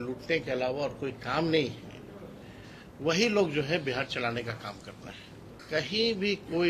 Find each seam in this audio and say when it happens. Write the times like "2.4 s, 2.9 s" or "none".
5.6 s